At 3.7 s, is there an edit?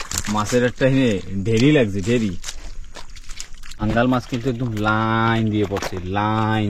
yes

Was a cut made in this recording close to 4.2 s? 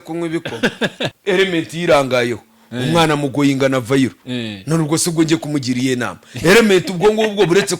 no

